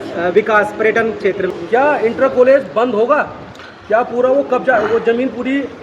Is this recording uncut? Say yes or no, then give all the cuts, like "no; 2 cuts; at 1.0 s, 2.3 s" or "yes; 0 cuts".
no; 1 cut; at 1.5 s